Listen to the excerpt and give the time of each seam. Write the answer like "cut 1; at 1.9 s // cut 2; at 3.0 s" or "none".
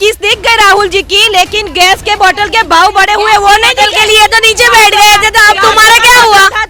none